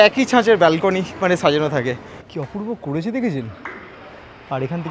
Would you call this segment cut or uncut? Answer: cut